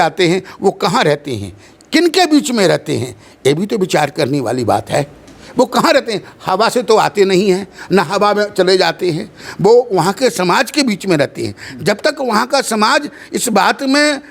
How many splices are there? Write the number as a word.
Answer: zero